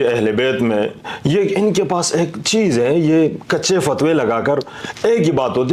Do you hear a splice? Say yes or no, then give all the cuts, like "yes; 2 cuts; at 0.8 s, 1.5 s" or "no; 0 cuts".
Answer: no; 0 cuts